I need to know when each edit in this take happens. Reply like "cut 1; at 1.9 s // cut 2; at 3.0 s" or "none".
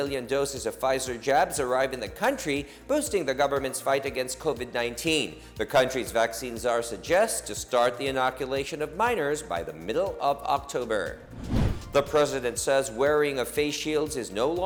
none

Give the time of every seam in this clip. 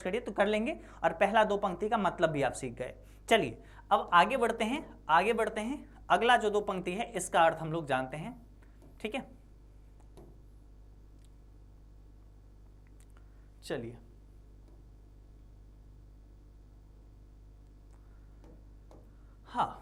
none

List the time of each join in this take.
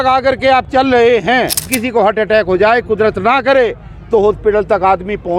cut 1; at 1.8 s

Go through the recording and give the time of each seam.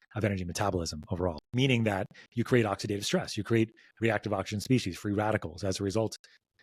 cut 1; at 1.4 s

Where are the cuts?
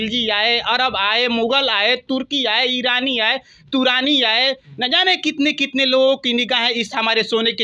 none

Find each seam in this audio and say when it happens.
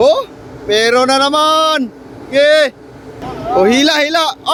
none

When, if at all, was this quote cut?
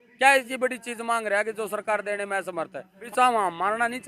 cut 1; at 3.1 s

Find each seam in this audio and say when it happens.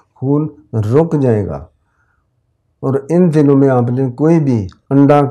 none

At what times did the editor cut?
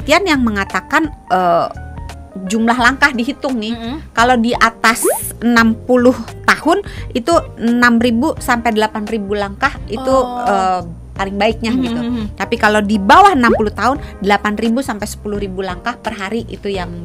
none

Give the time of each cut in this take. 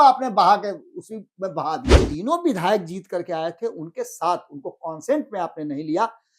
cut 1; at 2.0 s

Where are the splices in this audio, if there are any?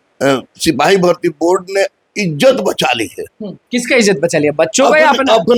none

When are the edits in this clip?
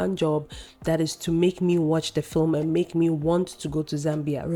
none

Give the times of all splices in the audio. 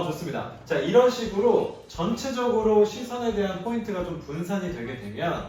none

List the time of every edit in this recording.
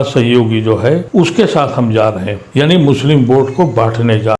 cut 1; at 1.1 s // cut 2; at 2.6 s

